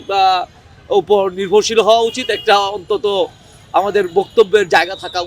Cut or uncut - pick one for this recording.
uncut